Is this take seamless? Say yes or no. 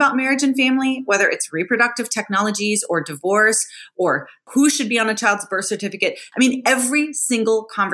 no